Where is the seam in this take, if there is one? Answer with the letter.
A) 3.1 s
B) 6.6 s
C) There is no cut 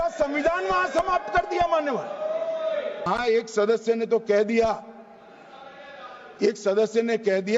A